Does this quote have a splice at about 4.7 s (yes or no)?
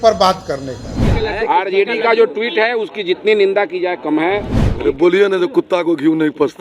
yes